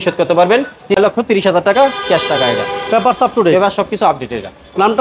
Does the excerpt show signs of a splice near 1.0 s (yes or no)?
yes